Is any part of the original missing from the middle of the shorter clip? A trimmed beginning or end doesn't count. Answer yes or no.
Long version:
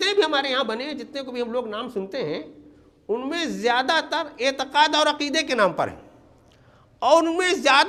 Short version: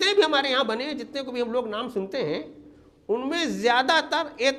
no